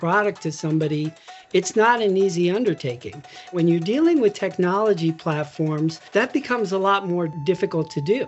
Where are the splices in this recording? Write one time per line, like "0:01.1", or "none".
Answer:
0:03.5
0:06.0
0:07.3